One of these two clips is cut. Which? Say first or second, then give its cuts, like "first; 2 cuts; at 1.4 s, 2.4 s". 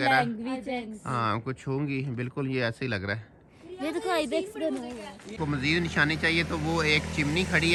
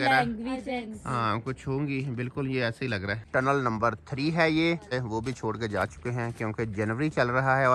second; 2 cuts; at 3.2 s, 4.9 s